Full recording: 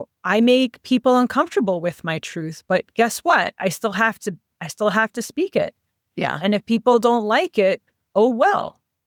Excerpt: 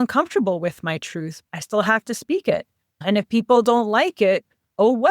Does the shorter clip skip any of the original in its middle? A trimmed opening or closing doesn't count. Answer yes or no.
yes